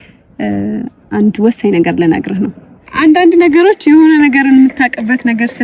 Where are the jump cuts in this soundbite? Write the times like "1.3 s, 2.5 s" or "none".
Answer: 2.8 s

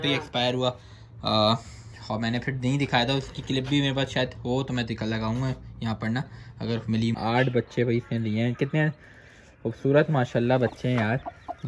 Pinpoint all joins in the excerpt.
7.1 s

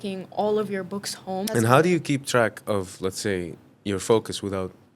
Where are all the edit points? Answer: 1.5 s

